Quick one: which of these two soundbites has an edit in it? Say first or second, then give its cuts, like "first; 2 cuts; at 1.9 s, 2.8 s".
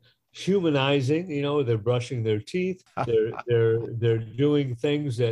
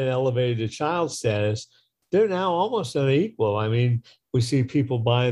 first; 1 cut; at 2.9 s